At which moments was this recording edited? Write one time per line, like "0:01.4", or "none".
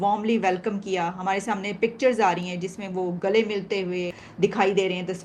0:04.2